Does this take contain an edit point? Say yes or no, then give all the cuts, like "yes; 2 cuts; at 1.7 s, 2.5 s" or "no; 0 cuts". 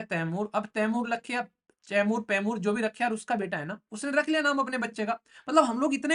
no; 0 cuts